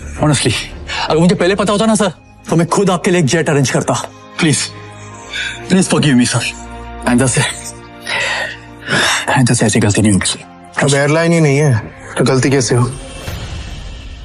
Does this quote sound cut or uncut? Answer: uncut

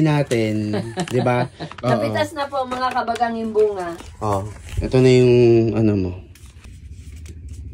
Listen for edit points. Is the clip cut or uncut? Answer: cut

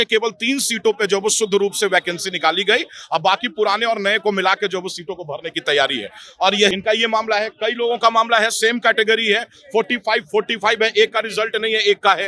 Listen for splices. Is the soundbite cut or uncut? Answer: cut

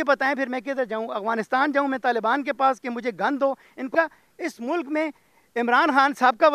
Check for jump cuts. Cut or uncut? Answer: cut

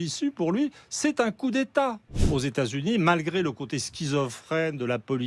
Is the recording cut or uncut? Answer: cut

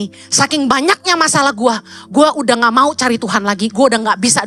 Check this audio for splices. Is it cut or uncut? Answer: uncut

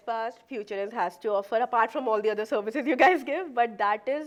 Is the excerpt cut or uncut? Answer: uncut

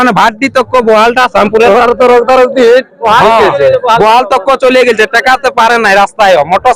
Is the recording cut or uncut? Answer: uncut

